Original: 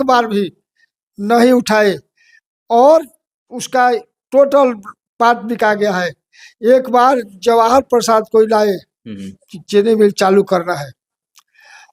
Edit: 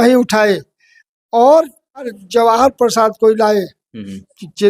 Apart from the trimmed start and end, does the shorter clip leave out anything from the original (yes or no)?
yes